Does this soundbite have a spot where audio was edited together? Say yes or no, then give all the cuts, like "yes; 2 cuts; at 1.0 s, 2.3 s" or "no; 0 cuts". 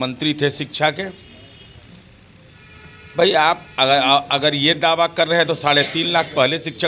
no; 0 cuts